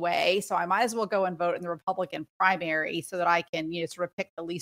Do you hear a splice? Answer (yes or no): no